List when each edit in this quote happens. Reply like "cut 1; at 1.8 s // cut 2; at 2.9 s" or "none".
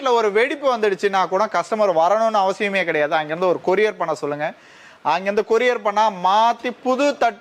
none

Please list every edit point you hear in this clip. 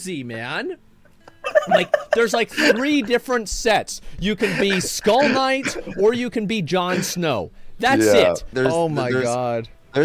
cut 1; at 8.5 s

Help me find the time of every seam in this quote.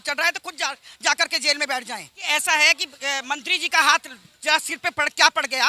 cut 1; at 2.1 s

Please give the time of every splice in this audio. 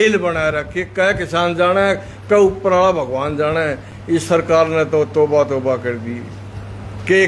none

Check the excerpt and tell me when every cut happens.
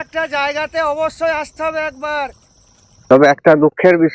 cut 1; at 3.0 s

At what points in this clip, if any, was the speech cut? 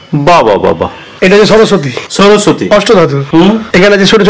cut 1; at 1.1 s

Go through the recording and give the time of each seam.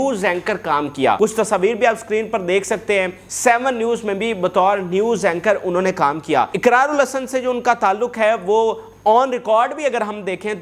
cut 1; at 1.2 s // cut 2; at 3.2 s // cut 3; at 6.5 s

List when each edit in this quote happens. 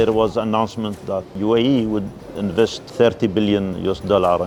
none

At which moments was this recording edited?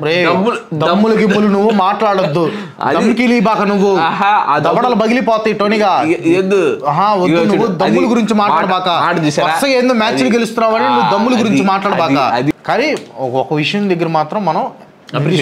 cut 1; at 12.5 s

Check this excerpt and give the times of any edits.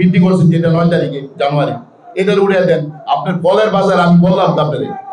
none

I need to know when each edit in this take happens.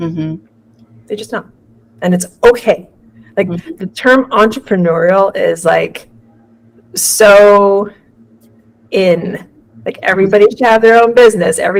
none

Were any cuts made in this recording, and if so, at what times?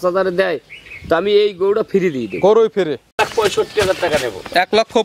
cut 1; at 3.2 s

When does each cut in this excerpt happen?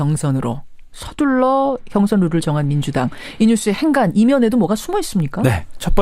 cut 1; at 3.3 s

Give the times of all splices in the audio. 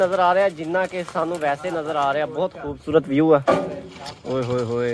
none

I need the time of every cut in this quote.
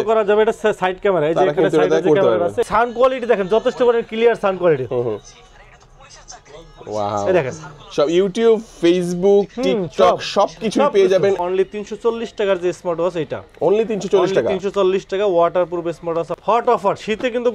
cut 1; at 2.6 s // cut 2; at 11.4 s // cut 3; at 16.3 s

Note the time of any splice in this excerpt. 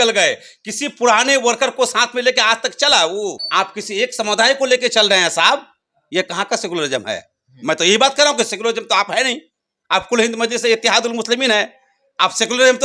cut 1; at 3.4 s

